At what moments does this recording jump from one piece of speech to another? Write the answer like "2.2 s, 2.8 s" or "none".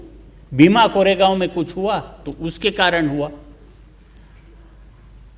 none